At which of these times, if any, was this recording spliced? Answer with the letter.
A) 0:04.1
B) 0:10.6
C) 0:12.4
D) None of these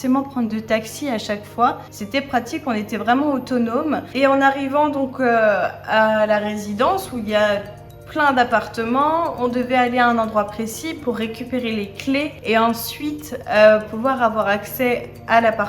A